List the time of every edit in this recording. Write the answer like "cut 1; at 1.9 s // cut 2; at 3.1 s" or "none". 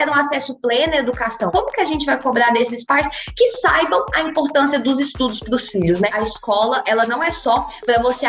cut 1; at 1.5 s // cut 2; at 6.1 s